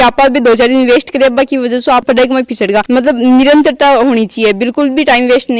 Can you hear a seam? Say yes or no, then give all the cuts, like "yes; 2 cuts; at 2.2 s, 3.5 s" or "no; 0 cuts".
no; 0 cuts